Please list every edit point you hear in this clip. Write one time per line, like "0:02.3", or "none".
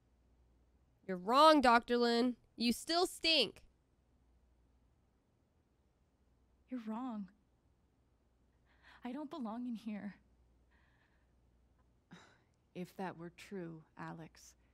none